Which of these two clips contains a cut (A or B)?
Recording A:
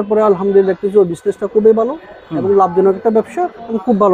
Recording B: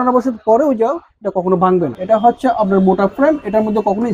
B